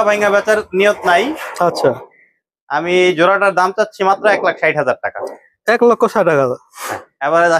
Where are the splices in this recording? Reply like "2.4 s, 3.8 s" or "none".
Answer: none